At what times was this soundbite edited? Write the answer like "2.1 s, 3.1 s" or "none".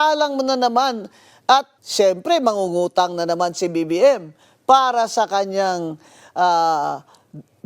1.8 s